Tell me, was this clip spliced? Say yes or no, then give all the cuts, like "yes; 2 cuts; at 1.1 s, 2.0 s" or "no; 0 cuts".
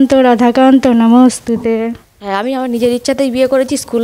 yes; 1 cut; at 2.1 s